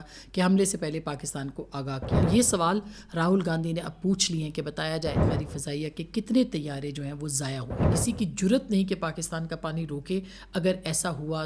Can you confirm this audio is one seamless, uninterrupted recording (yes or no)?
no